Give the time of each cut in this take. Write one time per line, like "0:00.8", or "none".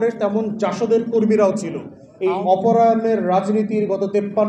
0:01.9